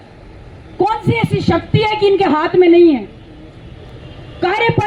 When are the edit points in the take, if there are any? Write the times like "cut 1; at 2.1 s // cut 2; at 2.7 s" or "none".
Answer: none